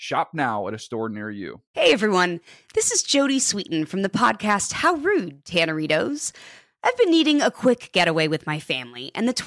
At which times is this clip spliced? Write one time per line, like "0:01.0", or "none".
0:01.6